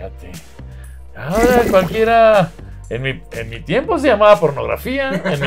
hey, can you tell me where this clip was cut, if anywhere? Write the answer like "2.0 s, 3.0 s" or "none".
none